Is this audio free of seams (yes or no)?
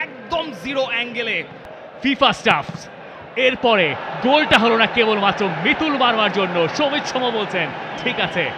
no